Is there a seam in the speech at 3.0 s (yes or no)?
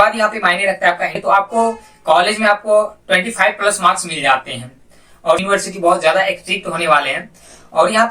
no